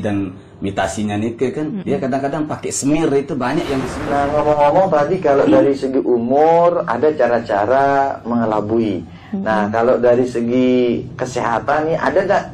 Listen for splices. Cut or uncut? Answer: cut